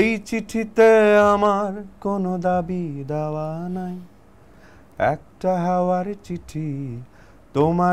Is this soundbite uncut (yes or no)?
yes